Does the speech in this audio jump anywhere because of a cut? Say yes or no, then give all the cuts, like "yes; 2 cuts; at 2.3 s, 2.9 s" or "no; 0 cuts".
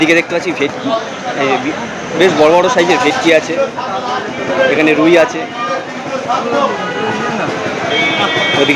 no; 0 cuts